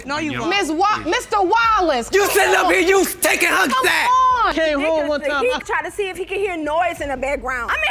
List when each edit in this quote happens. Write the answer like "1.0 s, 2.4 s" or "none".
4.5 s